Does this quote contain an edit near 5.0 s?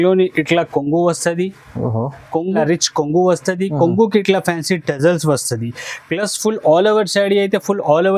no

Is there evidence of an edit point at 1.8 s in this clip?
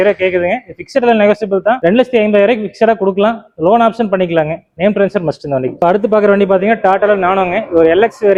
no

